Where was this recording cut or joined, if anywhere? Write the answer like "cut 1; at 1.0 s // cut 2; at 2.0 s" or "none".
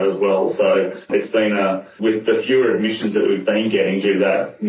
cut 1; at 1.0 s // cut 2; at 1.9 s